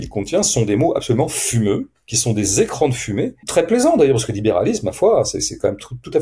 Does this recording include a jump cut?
yes; 1 cut; at 3.4 s

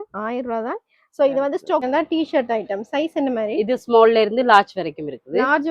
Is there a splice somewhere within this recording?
yes; 1 cut; at 1.8 s

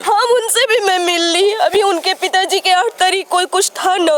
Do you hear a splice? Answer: no; 0 cuts

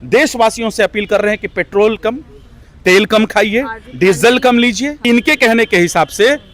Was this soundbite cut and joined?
yes; 1 cut; at 5.0 s

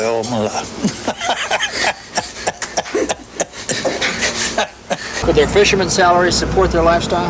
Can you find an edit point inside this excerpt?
yes; 1 cut; at 5.2 s

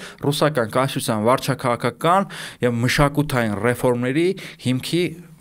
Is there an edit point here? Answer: no; 0 cuts

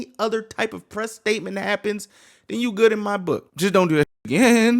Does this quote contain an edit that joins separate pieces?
yes; 1 cut; at 3.5 s

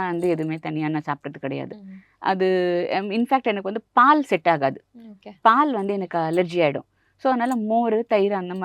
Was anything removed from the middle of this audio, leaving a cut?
no; 0 cuts

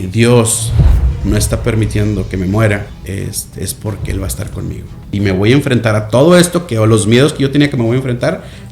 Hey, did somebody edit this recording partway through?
yes; 2 cuts; at 2.9 s, 5.1 s

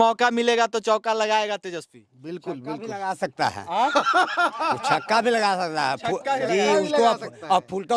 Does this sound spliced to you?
no; 0 cuts

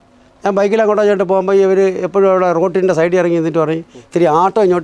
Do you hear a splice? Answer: no; 0 cuts

